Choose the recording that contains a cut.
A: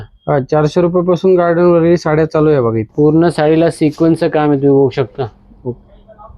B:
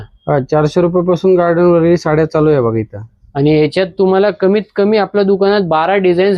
A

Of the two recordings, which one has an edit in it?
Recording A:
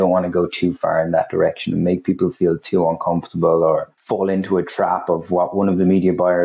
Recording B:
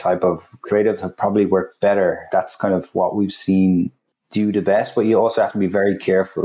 B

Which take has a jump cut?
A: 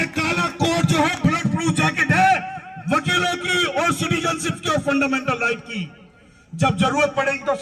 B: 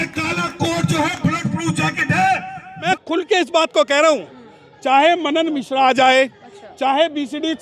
B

